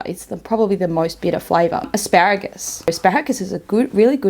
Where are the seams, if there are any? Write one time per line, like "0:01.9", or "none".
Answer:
0:01.9
0:02.9